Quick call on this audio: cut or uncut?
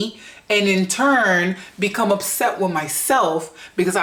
uncut